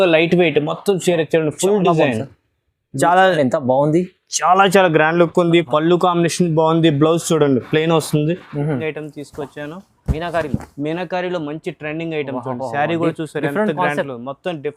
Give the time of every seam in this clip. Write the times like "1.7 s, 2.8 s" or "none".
8.8 s